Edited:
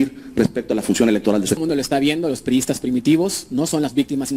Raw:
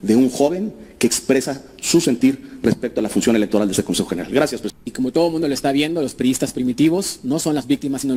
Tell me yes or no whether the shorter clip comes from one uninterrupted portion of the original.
no